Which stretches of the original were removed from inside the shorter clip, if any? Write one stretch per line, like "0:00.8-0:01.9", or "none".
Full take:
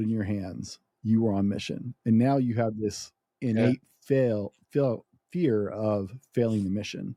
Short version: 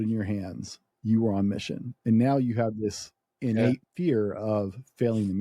0:03.9-0:05.2